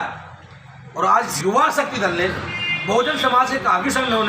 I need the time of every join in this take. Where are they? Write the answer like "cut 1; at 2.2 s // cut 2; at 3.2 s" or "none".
cut 1; at 1.3 s